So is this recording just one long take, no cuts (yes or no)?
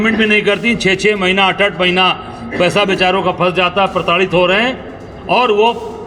yes